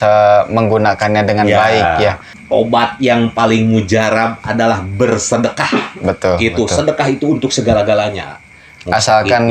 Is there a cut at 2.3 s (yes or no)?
yes